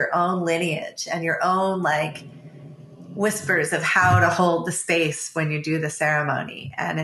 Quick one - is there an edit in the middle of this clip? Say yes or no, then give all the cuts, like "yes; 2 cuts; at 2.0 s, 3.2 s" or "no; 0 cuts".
no; 0 cuts